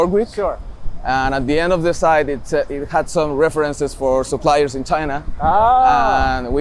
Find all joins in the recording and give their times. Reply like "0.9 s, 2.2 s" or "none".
none